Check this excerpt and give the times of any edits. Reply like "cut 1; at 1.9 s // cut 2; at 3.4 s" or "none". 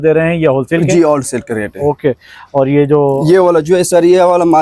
none